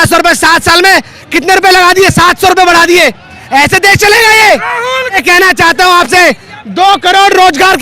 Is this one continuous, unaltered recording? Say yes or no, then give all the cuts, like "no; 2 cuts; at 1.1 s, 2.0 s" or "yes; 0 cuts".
no; 1 cut; at 5.2 s